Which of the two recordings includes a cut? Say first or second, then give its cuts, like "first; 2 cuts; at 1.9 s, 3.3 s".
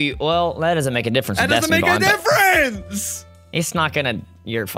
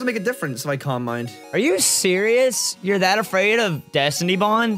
second; 1 cut; at 1.4 s